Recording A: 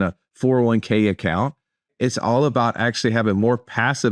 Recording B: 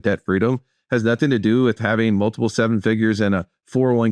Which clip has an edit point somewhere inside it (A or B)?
A